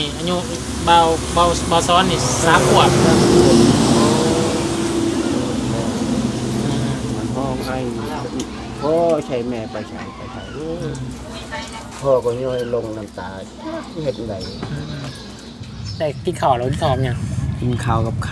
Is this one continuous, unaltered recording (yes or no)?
no